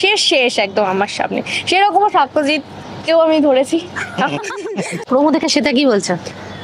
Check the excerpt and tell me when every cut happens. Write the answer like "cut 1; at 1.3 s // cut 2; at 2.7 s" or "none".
cut 1; at 5.0 s